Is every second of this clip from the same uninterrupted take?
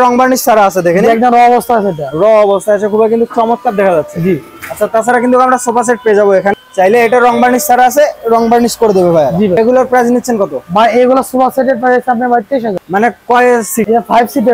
yes; 0 cuts

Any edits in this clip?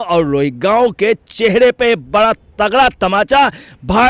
no; 0 cuts

